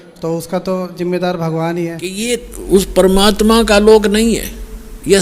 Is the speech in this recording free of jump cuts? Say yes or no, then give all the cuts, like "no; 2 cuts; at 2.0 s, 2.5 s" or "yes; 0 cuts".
no; 1 cut; at 2.4 s